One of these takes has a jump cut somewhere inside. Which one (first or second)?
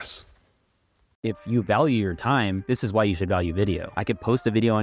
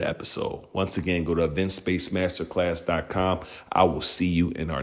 first